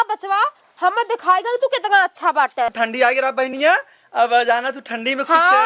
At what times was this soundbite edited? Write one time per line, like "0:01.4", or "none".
0:02.7

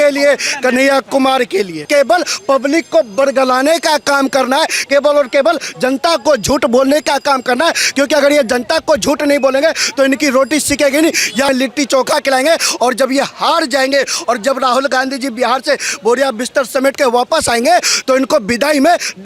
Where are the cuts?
0:01.9
0:11.5

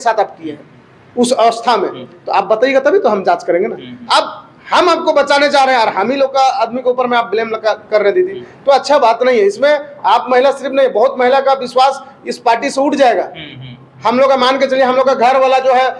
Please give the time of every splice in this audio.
none

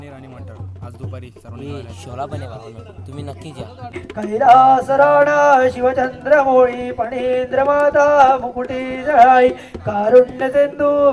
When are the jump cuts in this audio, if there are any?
0:03.9

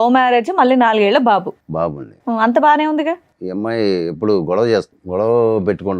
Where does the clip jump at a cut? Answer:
0:03.4
0:05.0

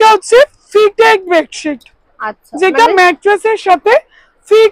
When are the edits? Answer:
none

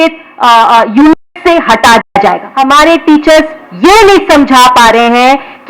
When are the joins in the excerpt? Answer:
0:02.5

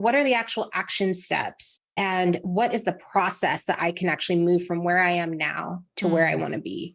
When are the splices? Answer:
none

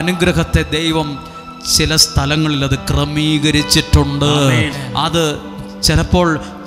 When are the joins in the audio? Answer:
0:04.8

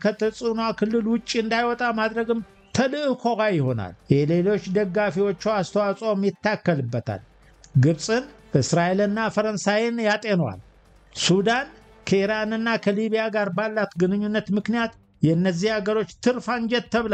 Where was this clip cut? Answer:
none

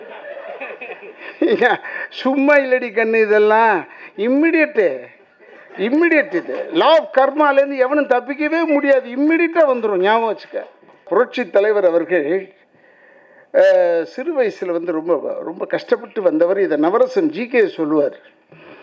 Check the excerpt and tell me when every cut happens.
0:11.1

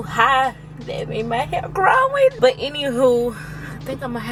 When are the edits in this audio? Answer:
none

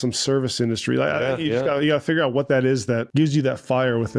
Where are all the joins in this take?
0:03.1

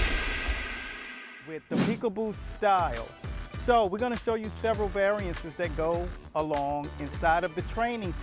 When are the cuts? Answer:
0:01.9

